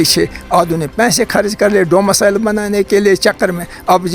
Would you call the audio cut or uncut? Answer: uncut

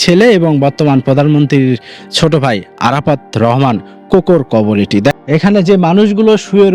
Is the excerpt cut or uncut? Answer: cut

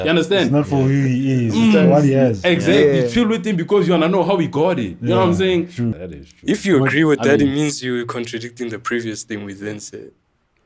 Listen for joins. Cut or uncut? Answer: cut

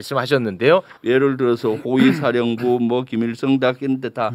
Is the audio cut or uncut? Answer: cut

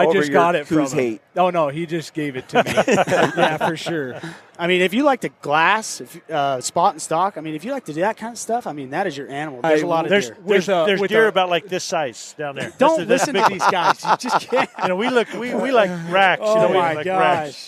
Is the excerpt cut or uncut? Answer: cut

